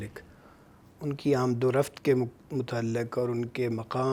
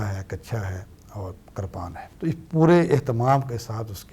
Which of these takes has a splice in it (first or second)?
second